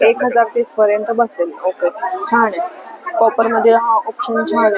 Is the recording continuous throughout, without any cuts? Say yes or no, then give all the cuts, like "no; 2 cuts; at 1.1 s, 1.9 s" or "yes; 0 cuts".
yes; 0 cuts